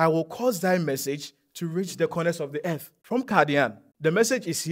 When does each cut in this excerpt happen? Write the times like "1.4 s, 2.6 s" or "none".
2.9 s, 3.8 s